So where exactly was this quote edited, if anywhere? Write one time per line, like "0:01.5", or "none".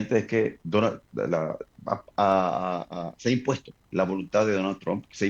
0:03.7